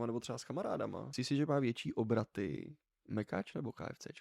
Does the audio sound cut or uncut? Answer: cut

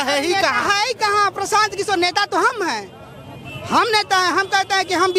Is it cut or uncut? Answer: uncut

